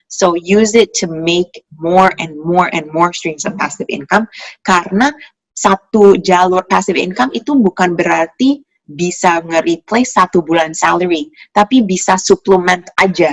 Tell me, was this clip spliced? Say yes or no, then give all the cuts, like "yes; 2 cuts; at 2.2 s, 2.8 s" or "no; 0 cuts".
no; 0 cuts